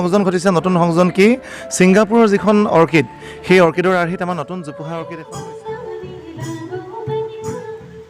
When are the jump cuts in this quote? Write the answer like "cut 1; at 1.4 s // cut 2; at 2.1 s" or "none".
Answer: cut 1; at 5.0 s